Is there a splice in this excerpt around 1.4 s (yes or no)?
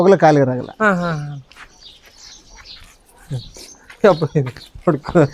no